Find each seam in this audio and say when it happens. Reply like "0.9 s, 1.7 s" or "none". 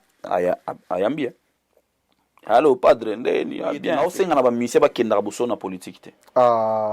4.0 s